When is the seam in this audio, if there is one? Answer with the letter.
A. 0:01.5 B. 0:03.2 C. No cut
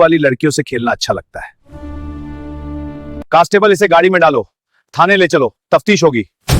B